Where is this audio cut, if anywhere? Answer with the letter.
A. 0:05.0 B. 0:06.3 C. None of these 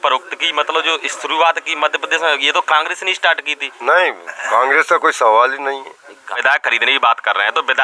B